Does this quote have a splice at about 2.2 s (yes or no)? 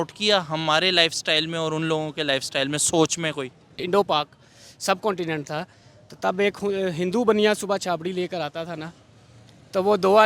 no